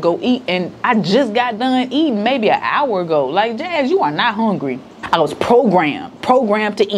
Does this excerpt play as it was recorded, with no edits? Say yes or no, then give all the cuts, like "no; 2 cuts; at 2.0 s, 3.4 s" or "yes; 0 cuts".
yes; 0 cuts